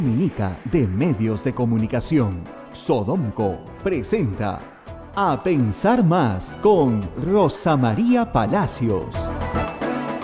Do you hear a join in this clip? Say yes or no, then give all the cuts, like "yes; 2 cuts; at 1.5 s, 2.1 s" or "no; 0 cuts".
no; 0 cuts